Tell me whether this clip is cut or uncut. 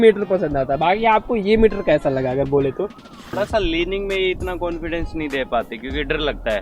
cut